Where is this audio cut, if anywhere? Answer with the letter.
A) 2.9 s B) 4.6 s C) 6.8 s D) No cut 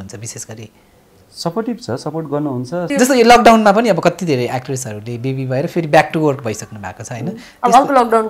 A